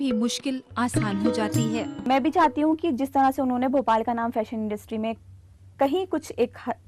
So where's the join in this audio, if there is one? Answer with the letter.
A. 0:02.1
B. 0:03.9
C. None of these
A